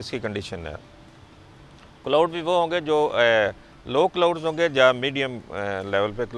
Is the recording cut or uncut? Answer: uncut